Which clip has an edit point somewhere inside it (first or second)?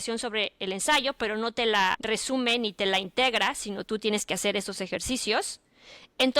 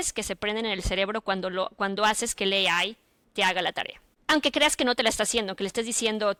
first